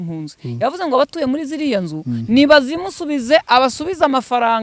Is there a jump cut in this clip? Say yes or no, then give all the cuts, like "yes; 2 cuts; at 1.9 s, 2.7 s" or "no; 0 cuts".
no; 0 cuts